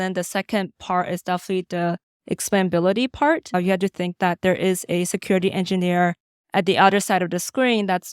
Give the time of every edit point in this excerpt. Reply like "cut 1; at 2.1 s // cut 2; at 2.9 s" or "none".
cut 1; at 3.5 s

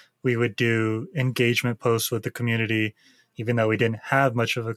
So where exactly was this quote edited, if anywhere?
none

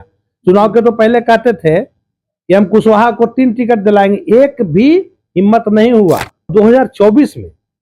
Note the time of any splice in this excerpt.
cut 1; at 6.5 s

